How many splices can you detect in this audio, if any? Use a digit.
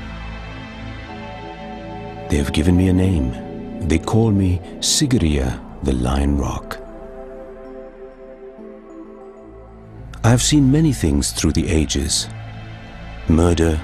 0